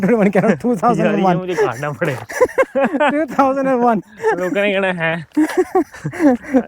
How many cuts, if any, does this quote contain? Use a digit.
0